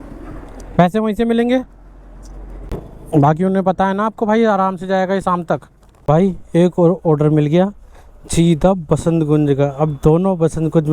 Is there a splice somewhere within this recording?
yes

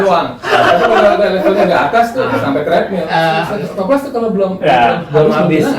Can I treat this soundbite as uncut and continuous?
no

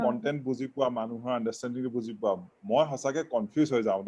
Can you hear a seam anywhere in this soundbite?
no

